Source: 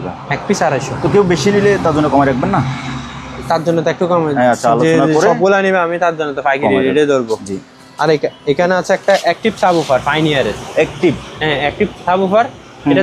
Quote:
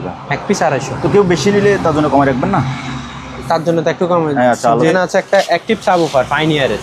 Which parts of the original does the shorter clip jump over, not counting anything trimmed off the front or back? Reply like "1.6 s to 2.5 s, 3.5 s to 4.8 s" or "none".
4.9 s to 8.7 s